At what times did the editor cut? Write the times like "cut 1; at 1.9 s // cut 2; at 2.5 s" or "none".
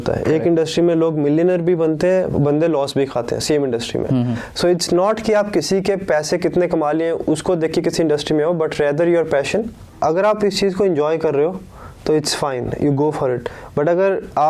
cut 1; at 9.8 s